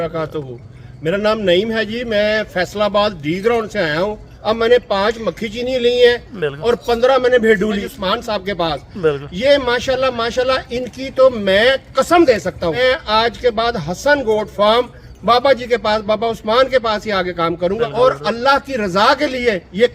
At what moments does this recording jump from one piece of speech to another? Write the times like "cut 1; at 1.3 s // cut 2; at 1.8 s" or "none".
cut 1; at 4.3 s // cut 2; at 7.8 s // cut 3; at 12.8 s // cut 4; at 17.9 s

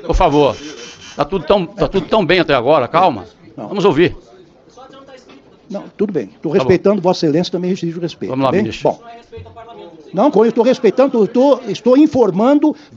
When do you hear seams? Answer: none

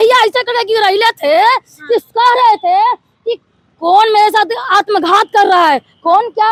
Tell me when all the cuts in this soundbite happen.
none

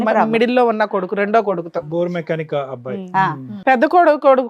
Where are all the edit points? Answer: cut 1; at 3.5 s

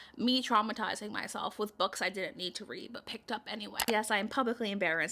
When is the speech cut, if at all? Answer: cut 1; at 3.8 s

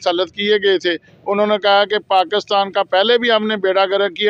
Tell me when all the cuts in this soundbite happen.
none

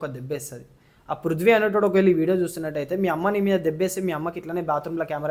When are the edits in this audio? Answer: none

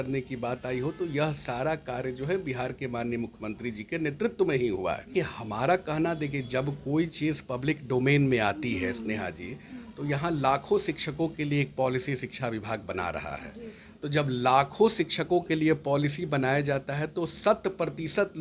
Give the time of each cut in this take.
cut 1; at 5.0 s

